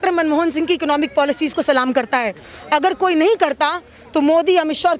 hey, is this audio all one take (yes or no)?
yes